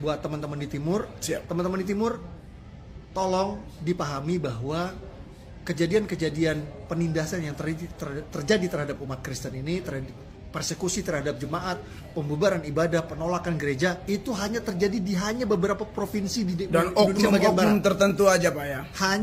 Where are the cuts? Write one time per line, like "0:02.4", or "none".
none